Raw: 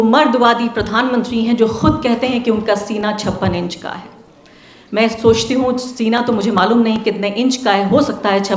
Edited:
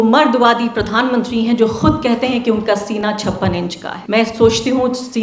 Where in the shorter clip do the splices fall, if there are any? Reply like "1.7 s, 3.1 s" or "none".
3.9 s